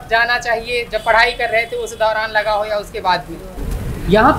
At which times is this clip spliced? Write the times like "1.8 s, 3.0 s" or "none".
3.4 s